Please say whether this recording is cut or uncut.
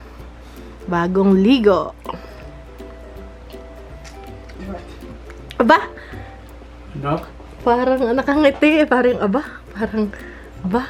uncut